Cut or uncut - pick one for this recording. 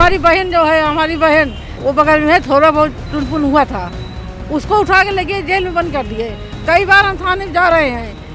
cut